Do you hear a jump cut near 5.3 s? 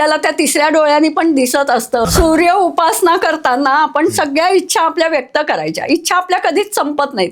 no; 1 cut; at 2.1 s

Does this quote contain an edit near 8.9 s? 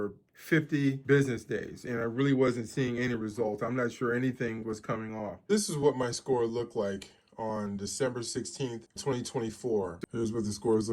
yes; 4 cuts; at 1.0 s, 5.5 s, 8.9 s, 10.0 s

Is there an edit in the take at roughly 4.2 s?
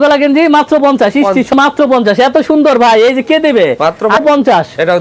yes; 2 cuts; at 1.5 s, 4.2 s

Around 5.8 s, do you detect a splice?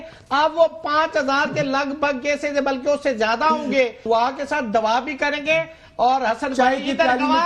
no; 1 cut; at 4.0 s

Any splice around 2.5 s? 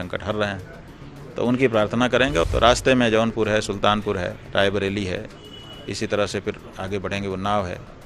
yes; 1 cut; at 2.5 s

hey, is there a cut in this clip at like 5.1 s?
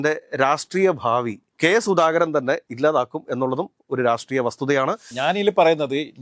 yes; 2 cuts; at 1.4 s, 5.1 s

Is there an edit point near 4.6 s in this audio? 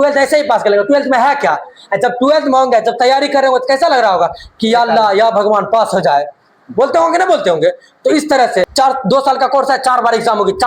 no; 1 cut; at 8.7 s

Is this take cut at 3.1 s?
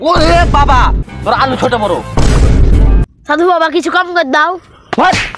no; 1 cut; at 1.1 s

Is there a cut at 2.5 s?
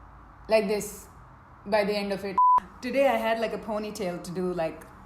yes; 1 cut; at 2.5 s

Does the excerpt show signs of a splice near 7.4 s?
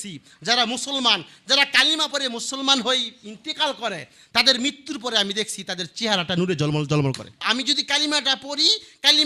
yes; 1 cut; at 7.4 s

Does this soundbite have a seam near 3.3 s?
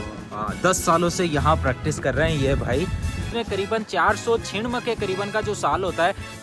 yes; 1 cut; at 3.3 s

